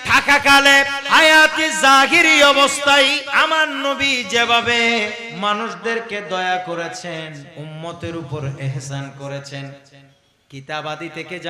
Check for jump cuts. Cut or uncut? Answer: cut